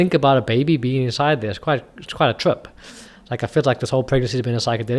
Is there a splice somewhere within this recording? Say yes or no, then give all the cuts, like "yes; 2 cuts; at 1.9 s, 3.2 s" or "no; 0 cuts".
no; 0 cuts